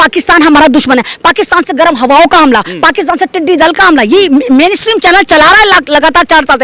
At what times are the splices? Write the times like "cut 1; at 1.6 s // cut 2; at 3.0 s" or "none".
none